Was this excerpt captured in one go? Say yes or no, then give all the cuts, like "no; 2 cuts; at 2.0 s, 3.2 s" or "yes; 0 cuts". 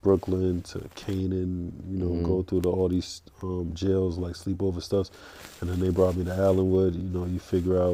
yes; 0 cuts